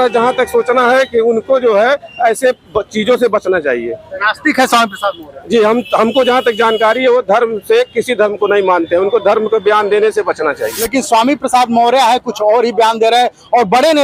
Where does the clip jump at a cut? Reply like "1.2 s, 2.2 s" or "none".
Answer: 10.9 s